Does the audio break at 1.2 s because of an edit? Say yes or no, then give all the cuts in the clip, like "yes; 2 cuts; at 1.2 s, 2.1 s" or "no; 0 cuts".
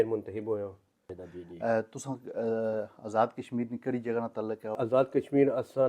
yes; 2 cuts; at 1.2 s, 4.8 s